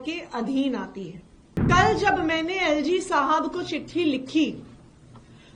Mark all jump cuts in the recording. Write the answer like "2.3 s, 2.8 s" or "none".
1.7 s